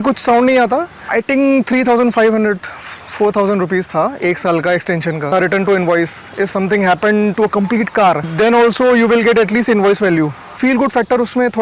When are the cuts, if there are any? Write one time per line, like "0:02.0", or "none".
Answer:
0:01.0
0:05.3
0:10.6

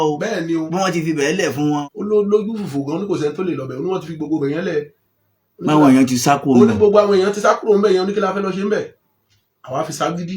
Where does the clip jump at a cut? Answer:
0:01.8

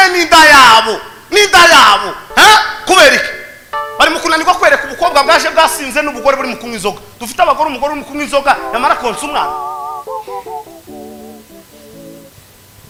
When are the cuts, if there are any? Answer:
none

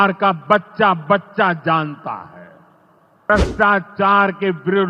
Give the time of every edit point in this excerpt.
0:03.3

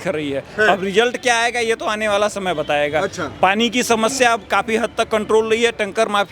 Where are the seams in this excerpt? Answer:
none

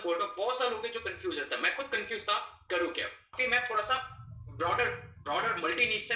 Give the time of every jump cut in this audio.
none

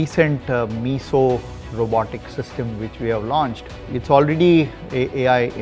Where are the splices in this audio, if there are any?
0:03.7

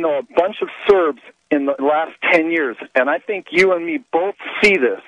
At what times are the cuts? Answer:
none

